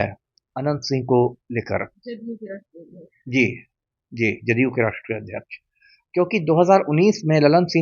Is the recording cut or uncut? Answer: uncut